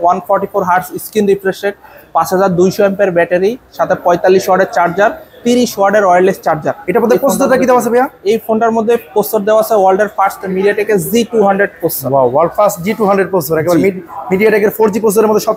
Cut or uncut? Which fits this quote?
uncut